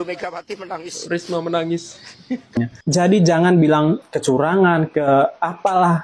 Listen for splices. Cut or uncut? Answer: cut